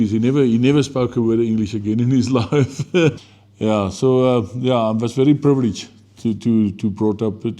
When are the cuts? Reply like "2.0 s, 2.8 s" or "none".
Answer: 3.2 s